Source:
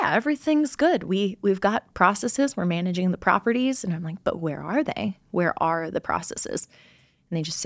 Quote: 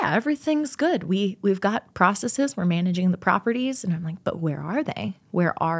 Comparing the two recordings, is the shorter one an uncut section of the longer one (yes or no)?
yes